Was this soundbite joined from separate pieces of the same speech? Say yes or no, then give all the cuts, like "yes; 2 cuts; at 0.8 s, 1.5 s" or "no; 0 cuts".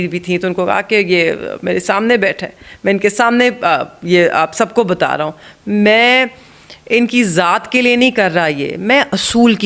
no; 0 cuts